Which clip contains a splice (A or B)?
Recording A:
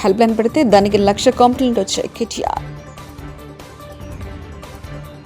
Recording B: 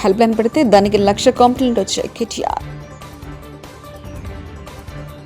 B